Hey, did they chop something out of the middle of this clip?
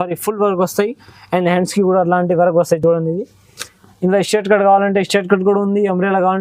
no; 0 cuts

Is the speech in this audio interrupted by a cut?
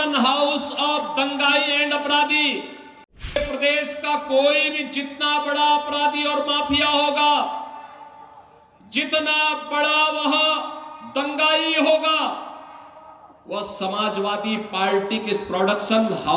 yes; 1 cut; at 3.4 s

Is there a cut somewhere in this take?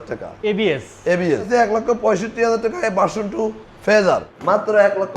yes; 2 cuts; at 1.5 s, 4.3 s

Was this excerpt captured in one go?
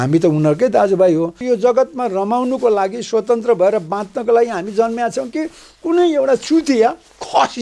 no; 1 cut; at 1.4 s

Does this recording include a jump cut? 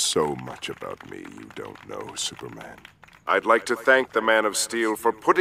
no; 0 cuts

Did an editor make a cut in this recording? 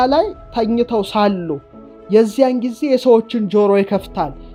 no; 0 cuts

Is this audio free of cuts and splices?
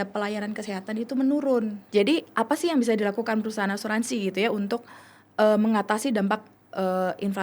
no; 1 cut; at 1.8 s

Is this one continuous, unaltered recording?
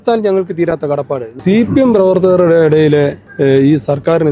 no; 2 cuts; at 1.3 s, 3.2 s

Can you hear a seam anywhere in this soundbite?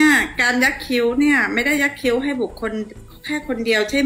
no; 0 cuts

